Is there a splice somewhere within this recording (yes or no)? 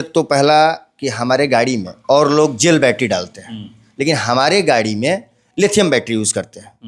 no